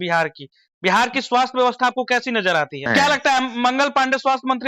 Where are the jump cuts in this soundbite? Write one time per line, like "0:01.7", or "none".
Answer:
0:02.9